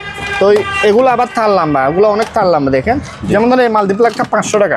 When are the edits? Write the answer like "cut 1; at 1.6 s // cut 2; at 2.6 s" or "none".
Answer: none

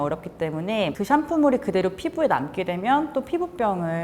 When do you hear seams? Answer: cut 1; at 0.9 s

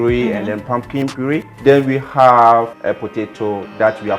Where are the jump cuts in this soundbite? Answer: cut 1; at 1.5 s // cut 2; at 2.7 s

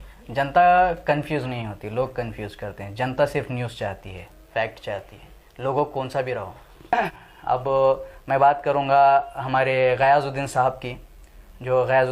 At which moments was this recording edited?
cut 1; at 6.7 s

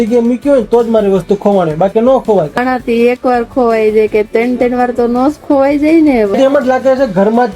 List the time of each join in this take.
cut 1; at 2.6 s // cut 2; at 6.3 s

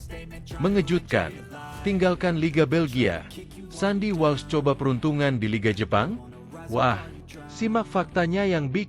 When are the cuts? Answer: none

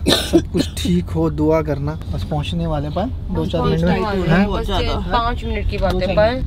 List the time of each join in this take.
none

